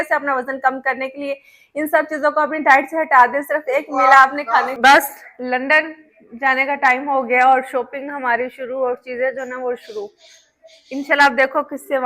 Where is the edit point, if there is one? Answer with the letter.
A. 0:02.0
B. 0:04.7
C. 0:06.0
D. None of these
B